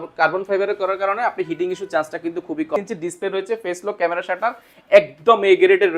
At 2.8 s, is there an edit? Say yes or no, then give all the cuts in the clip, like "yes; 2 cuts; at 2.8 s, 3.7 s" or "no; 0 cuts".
yes; 1 cut; at 2.8 s